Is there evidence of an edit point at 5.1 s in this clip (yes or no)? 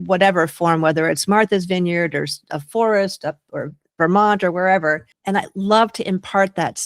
yes